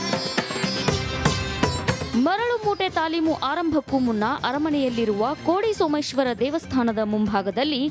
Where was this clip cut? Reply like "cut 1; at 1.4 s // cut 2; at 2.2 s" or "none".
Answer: cut 1; at 1.8 s